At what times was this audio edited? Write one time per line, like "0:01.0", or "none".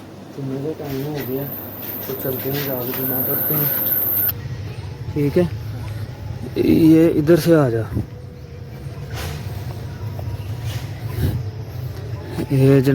0:04.3